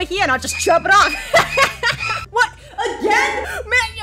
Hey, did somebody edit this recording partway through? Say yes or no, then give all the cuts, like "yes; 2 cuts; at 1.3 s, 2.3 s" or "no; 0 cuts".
yes; 1 cut; at 2.2 s